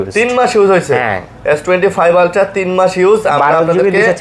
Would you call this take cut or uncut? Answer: uncut